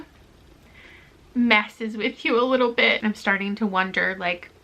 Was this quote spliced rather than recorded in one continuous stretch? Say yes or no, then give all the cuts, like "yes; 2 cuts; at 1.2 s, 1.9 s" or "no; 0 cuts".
yes; 1 cut; at 3.0 s